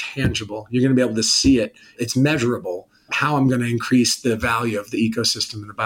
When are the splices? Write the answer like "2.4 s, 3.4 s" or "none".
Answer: 2.0 s, 3.1 s